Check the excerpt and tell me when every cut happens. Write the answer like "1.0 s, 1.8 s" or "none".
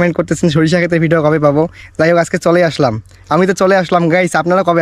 none